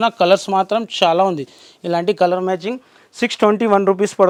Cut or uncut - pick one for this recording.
uncut